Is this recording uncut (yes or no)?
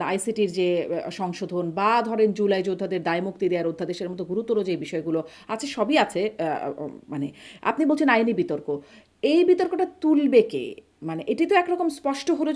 yes